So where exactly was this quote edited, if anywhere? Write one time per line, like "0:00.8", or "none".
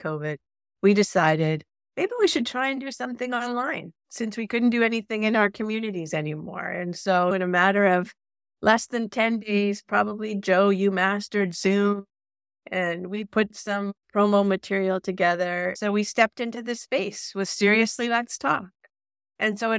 0:15.8